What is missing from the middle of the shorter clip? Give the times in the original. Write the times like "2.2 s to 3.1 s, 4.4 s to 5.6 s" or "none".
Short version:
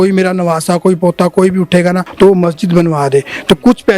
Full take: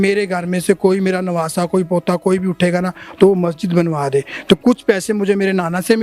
2.9 s to 3.1 s